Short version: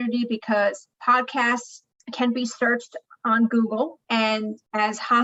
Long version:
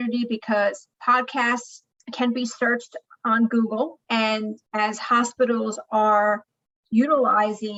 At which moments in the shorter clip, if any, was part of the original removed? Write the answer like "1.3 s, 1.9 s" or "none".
none

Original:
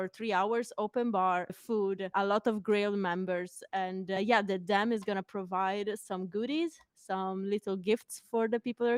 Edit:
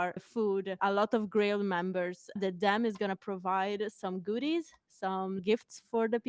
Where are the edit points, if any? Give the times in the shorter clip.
2.4 s, 5.4 s

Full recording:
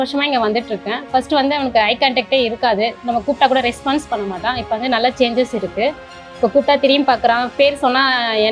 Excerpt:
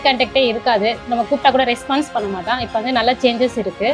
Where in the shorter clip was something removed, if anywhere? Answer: none

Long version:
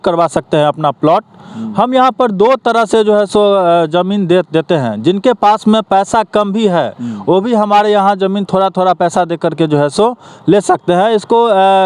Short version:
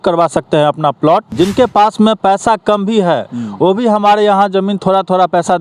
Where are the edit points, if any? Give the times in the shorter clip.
1.3 s

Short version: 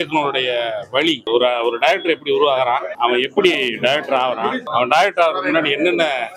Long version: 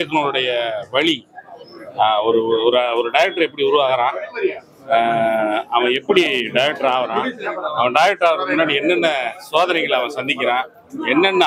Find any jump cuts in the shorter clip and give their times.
1.3 s, 2.9 s, 4.6 s

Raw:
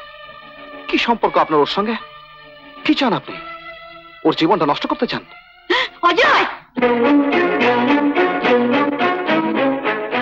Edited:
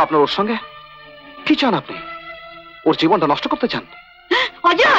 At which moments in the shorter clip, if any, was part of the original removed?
none

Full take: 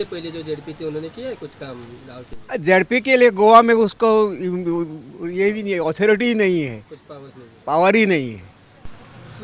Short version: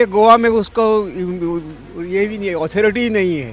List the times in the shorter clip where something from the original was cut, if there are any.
none

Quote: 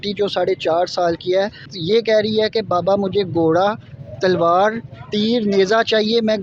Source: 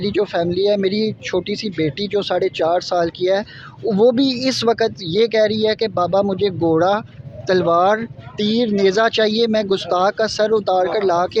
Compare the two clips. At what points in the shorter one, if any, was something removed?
1.7 s

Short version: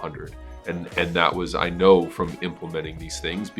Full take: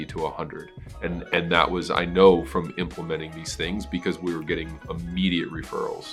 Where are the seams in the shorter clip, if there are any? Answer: none

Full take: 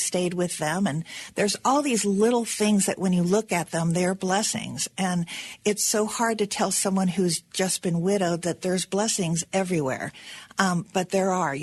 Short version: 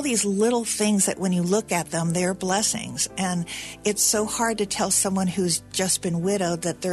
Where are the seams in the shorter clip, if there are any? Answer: none

